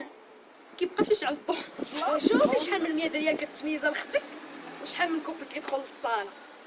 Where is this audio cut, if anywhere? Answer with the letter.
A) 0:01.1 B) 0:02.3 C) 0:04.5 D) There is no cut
B